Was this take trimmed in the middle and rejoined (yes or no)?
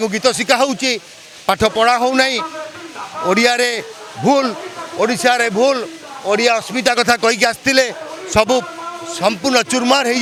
no